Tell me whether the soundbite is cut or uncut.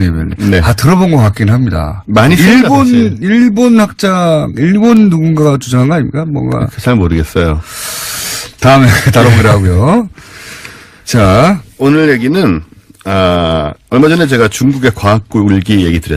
uncut